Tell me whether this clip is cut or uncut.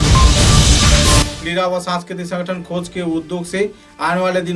cut